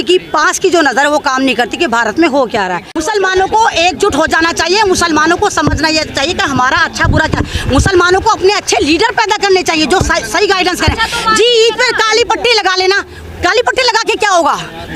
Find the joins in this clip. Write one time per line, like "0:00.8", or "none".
0:03.0